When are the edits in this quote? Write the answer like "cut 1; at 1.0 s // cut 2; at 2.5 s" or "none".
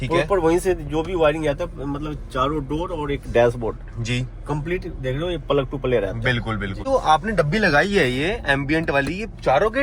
cut 1; at 6.9 s

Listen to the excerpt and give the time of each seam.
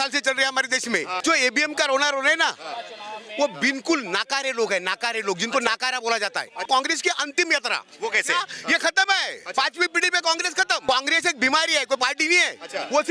cut 1; at 1.2 s // cut 2; at 6.6 s // cut 3; at 10.8 s

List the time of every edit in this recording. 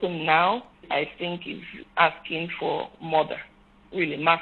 cut 1; at 0.8 s // cut 2; at 1.7 s

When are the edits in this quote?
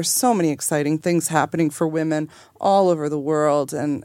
cut 1; at 1.0 s

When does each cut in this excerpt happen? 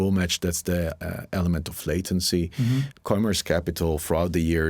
cut 1; at 2.9 s

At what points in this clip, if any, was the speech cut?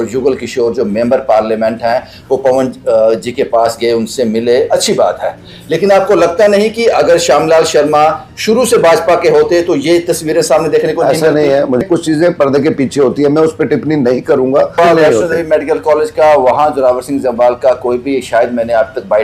cut 1; at 11.8 s // cut 2; at 14.8 s

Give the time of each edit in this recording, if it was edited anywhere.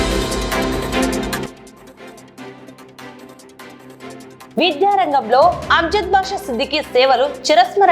cut 1; at 1.5 s // cut 2; at 4.5 s

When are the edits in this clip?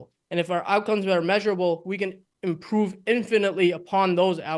none

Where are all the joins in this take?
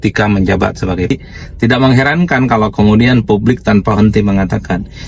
cut 1; at 1.1 s

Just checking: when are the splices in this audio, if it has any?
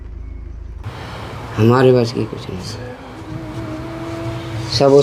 cut 1; at 1.0 s

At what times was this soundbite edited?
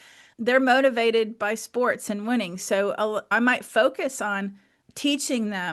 cut 1; at 3.3 s // cut 2; at 4.7 s

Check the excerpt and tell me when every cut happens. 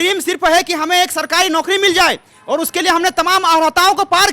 none

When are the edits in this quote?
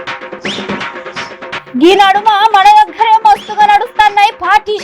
none

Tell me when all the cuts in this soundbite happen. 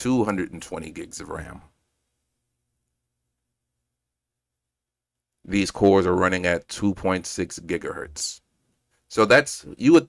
none

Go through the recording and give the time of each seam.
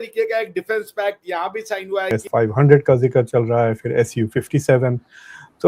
cut 1; at 2.1 s

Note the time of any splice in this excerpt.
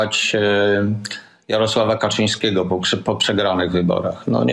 none

